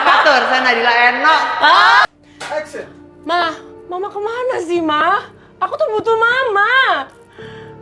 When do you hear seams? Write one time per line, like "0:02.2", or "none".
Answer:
0:02.0

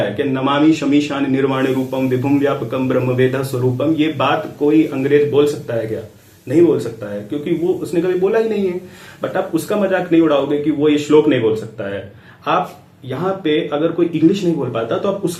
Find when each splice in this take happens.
none

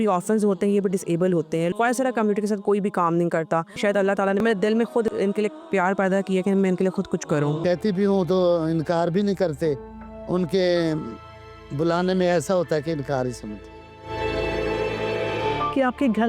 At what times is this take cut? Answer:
0:01.7
0:04.0
0:05.1
0:07.6
0:15.5

